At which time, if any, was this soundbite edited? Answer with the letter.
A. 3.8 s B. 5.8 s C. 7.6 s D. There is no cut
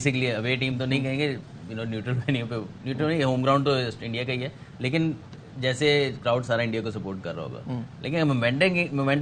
D